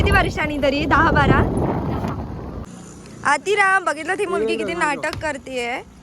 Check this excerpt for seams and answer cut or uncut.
cut